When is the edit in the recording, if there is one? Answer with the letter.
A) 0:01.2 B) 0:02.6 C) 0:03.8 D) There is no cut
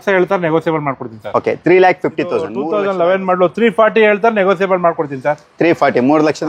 B